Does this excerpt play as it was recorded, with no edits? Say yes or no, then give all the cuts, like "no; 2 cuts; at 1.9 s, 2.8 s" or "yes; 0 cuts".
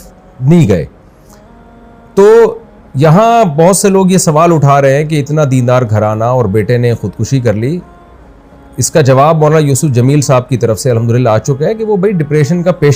yes; 0 cuts